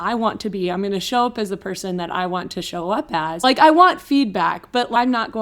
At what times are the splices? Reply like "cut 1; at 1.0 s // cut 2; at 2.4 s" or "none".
cut 1; at 3.4 s